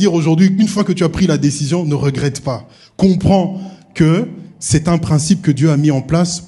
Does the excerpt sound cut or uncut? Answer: uncut